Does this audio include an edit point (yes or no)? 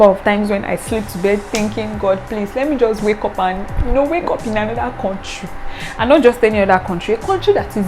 no